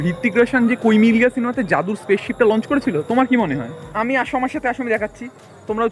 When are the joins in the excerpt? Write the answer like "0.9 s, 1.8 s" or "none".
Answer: 3.8 s

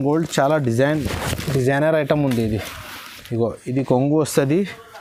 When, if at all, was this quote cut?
none

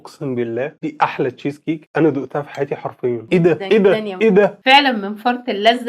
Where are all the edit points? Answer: 4.6 s

